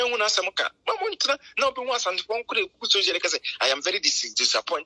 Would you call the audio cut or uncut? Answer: uncut